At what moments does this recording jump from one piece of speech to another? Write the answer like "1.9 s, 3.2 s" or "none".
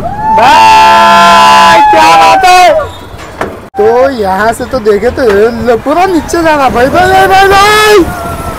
3.6 s